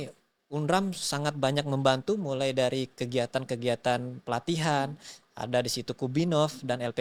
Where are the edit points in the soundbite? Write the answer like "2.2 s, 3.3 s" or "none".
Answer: none